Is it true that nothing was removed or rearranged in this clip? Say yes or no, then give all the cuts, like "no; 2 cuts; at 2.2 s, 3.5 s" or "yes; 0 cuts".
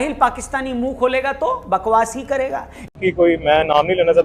no; 1 cut; at 2.6 s